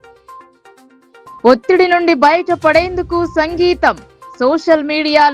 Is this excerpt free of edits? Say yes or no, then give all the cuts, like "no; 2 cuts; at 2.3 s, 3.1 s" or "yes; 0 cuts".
no; 1 cut; at 1.4 s